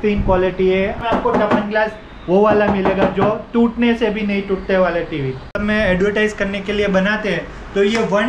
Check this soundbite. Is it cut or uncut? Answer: cut